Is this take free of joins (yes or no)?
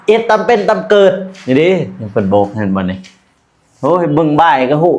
no